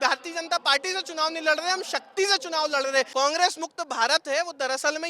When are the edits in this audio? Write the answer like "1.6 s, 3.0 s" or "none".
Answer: 3.1 s